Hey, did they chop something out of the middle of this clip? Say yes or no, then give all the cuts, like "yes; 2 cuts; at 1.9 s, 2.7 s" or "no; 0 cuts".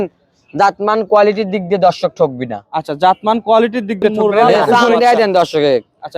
yes; 1 cut; at 4.5 s